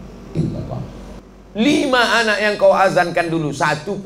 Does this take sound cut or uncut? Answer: cut